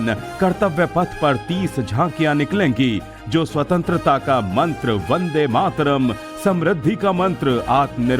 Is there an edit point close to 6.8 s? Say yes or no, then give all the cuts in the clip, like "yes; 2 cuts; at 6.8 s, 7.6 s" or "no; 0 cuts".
yes; 1 cut; at 6.8 s